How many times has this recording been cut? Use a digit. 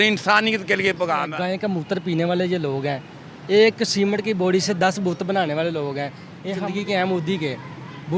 2